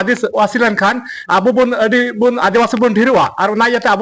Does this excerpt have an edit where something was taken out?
no; 0 cuts

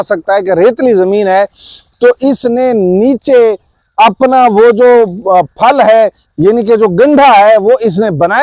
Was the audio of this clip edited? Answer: no; 0 cuts

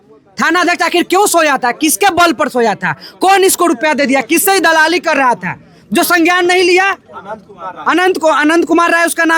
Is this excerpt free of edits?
yes; 0 cuts

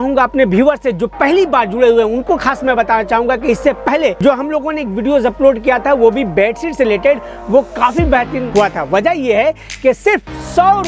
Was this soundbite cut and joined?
yes; 2 cuts; at 4.2 s, 8.4 s

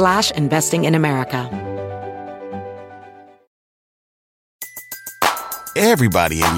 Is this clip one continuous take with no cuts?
no; 1 cut; at 1.5 s

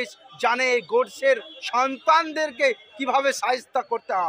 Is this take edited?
no; 0 cuts

